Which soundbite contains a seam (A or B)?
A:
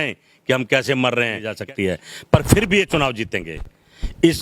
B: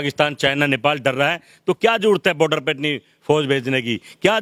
A